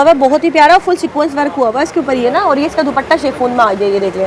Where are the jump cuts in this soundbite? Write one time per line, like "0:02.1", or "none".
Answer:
none